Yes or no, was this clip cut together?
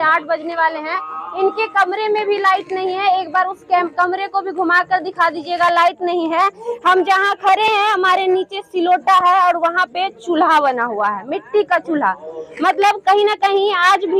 no